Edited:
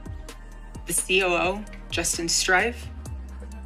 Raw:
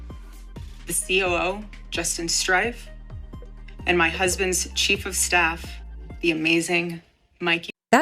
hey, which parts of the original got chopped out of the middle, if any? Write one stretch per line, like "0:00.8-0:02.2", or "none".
none